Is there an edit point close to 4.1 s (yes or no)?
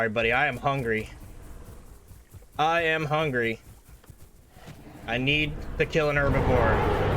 yes